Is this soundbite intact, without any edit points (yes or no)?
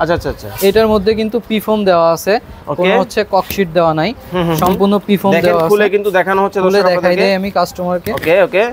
yes